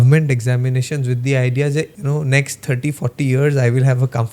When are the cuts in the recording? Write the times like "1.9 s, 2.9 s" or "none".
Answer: 2.0 s